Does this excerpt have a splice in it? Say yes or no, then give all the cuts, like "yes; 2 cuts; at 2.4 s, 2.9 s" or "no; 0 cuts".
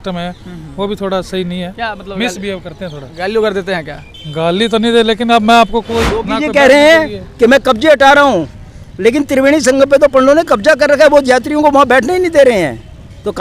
yes; 1 cut; at 6.2 s